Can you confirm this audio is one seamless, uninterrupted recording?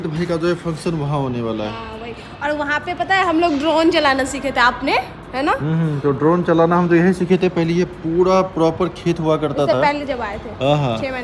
yes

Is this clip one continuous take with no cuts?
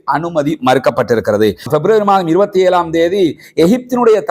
no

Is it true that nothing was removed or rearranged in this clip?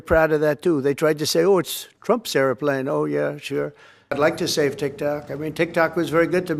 no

